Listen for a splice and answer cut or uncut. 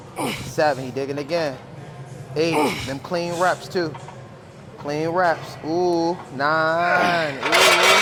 uncut